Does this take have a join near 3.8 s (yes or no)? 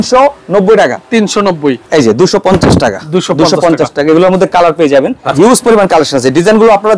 no